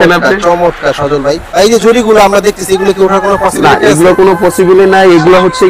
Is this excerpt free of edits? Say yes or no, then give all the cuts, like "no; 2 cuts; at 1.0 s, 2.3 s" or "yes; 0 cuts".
no; 1 cut; at 1.4 s